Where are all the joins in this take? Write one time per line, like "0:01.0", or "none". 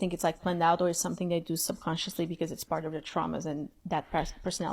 0:03.8